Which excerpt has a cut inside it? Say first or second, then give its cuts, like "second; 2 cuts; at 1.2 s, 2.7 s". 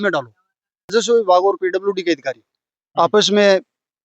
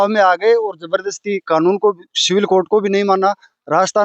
first; 1 cut; at 0.9 s